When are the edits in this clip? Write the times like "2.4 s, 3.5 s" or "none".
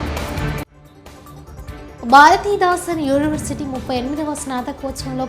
1.3 s

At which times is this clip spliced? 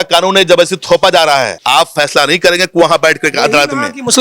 1.6 s

